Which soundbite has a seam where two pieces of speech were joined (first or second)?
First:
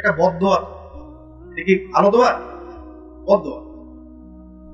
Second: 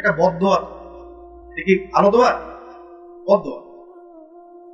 second